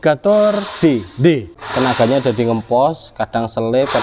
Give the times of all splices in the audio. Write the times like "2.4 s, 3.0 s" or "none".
1.6 s